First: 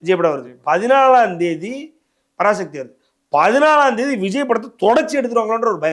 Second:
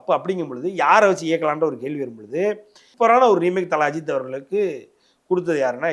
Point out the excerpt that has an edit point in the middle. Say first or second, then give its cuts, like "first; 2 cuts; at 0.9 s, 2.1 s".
second; 1 cut; at 2.9 s